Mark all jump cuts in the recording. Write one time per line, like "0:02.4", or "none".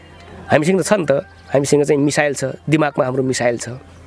none